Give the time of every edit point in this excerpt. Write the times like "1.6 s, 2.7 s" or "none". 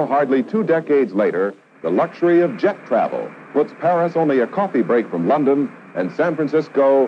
3.4 s

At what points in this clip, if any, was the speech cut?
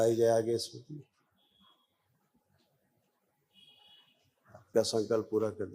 4.7 s

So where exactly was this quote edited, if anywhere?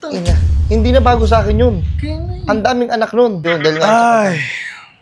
3.4 s

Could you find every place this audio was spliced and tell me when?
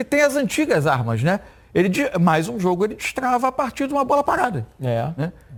none

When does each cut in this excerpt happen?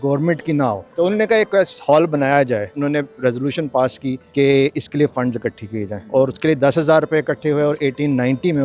0.8 s, 2.7 s, 4.2 s, 6.0 s

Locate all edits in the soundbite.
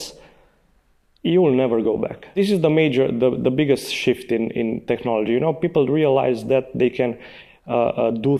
2.2 s

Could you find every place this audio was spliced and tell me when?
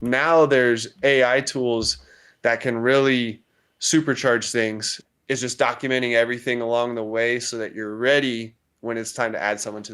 4.9 s

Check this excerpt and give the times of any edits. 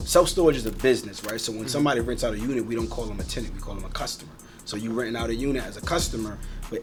none

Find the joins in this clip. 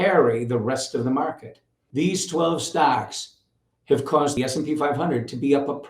1.8 s, 4.4 s

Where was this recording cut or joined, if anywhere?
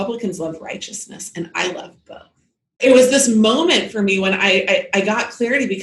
2.8 s

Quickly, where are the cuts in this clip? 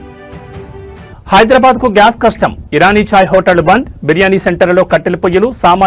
1.1 s

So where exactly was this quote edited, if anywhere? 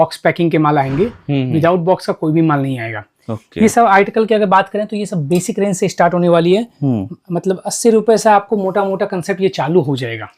none

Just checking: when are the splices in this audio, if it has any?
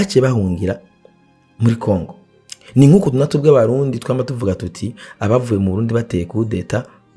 2.2 s

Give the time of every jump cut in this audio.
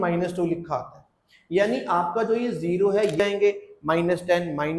3.2 s

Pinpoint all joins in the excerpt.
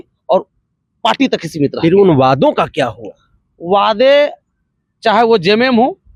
none

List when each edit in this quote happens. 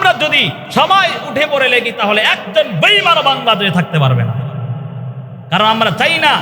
none

